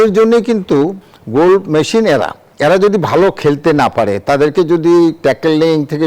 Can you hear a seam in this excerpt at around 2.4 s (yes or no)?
yes